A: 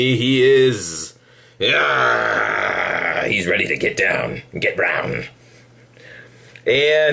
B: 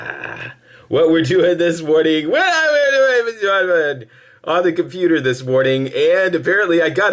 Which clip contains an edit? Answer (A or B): B